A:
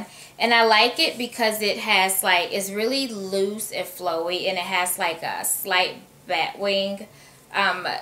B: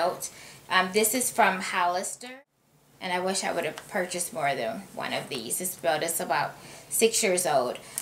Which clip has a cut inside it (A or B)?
B